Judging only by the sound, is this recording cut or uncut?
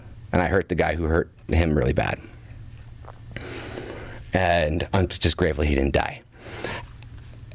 uncut